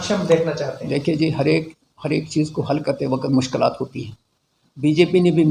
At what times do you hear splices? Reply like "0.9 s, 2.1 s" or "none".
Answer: none